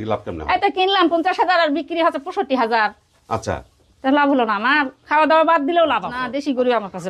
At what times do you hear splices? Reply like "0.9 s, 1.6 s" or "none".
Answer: 6.1 s